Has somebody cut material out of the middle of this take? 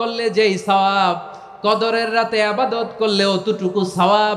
no; 0 cuts

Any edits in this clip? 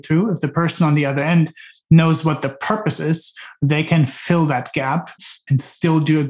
yes; 1 cut; at 5.2 s

